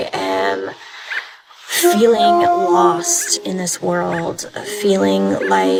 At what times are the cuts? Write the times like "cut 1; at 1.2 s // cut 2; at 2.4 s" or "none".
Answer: none